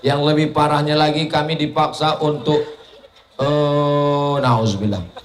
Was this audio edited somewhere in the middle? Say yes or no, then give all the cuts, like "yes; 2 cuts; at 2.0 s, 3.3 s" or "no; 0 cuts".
no; 0 cuts